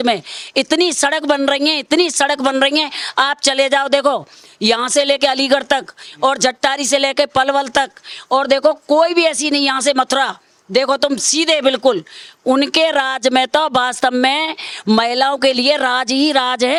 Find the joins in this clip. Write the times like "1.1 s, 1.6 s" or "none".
none